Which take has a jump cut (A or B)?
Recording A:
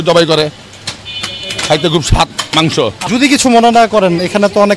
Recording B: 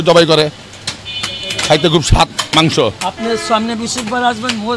A